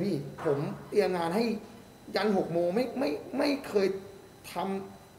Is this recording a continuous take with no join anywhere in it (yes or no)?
yes